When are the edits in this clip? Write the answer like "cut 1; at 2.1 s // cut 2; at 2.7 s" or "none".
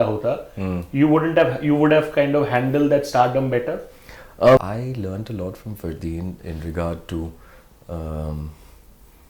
cut 1; at 4.6 s